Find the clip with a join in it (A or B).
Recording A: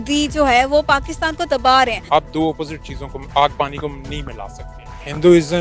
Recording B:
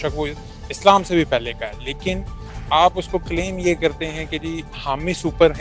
A